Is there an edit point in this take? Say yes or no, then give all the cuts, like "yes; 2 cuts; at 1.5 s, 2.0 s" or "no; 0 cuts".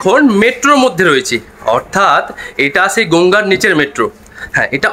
no; 0 cuts